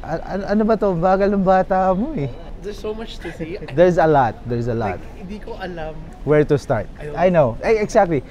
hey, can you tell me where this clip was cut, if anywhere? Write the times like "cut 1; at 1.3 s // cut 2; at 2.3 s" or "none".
cut 1; at 2.5 s // cut 2; at 6.1 s